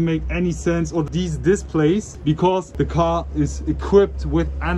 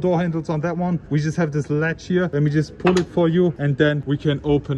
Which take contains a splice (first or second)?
second